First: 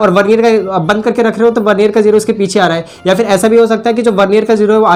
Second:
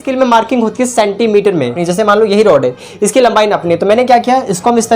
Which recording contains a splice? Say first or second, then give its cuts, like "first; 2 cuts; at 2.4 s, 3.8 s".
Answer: second; 1 cut; at 1.8 s